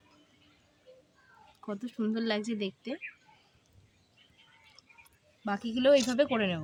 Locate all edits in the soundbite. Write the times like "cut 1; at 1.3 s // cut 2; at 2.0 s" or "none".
none